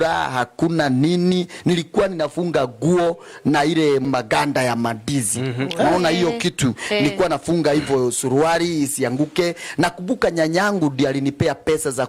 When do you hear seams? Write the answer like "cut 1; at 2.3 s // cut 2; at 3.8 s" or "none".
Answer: none